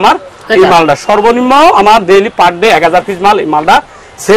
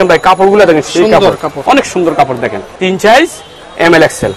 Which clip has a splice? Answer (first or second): second